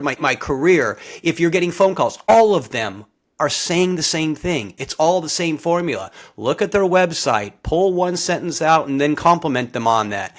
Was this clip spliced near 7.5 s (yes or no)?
no